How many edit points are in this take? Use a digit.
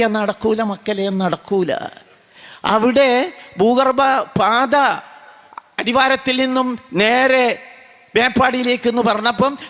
0